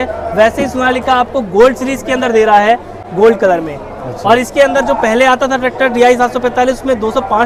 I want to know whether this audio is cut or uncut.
uncut